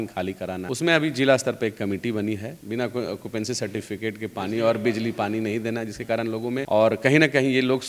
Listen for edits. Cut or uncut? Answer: cut